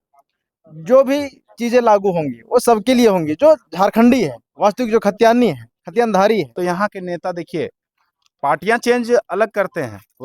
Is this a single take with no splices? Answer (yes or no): no